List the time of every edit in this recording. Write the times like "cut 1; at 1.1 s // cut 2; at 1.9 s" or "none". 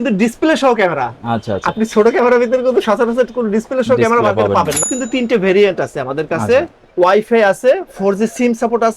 cut 1; at 4.8 s